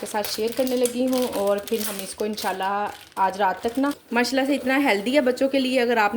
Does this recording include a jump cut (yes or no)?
yes